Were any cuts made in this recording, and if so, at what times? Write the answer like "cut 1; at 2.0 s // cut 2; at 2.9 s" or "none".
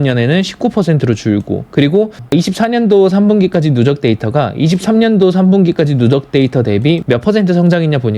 cut 1; at 2.2 s